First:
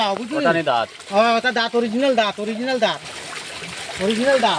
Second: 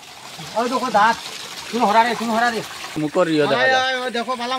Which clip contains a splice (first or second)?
second